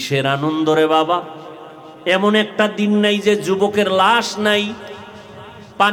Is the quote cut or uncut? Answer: uncut